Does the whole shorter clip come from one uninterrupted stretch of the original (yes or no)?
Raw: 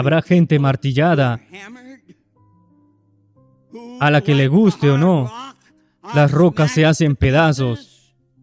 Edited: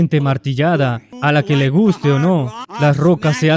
no